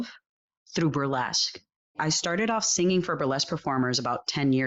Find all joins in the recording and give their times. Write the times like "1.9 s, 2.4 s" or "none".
2.0 s